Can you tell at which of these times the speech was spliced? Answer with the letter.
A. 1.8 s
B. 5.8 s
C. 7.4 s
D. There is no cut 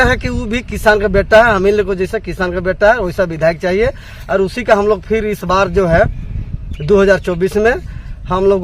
D